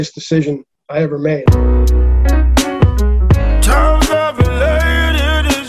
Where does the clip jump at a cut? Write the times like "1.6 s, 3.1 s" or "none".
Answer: 1.4 s